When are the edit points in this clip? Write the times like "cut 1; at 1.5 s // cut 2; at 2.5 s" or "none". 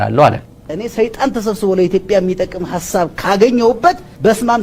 none